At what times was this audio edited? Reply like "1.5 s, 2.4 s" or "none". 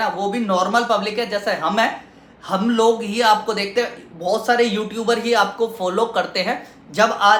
none